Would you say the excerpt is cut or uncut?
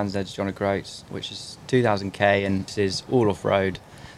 cut